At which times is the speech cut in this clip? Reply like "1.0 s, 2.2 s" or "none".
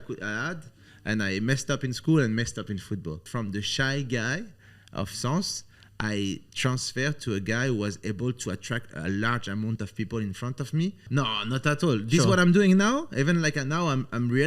3.3 s, 11.0 s